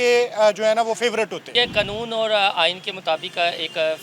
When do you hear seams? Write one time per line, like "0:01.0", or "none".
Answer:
0:01.5